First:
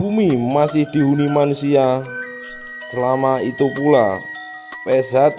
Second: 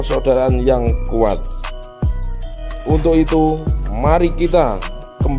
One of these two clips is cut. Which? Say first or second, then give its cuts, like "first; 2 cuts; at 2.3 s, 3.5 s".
second; 1 cut; at 2.5 s